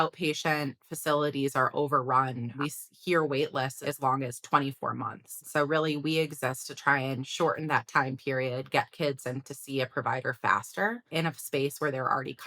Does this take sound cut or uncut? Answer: cut